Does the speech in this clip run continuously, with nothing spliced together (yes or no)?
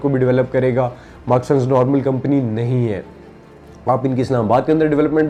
yes